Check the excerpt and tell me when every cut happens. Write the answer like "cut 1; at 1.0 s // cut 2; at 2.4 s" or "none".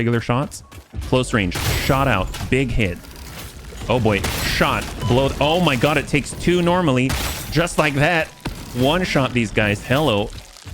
cut 1; at 9.8 s